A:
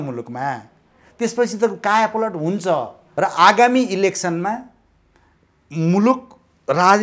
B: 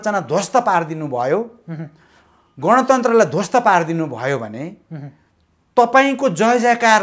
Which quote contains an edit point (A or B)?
A